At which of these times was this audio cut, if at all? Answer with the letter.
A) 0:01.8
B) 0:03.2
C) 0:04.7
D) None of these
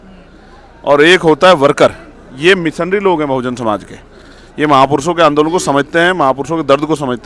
D